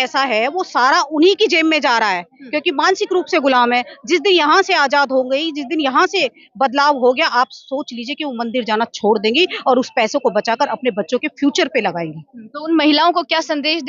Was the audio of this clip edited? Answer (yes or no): no